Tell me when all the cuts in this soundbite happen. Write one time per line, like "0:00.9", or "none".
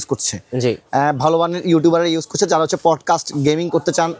none